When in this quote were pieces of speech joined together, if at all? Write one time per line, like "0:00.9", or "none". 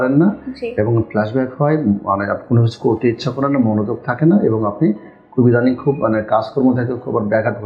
none